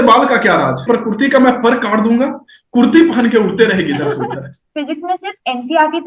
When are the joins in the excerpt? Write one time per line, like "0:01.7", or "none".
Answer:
0:00.8
0:04.6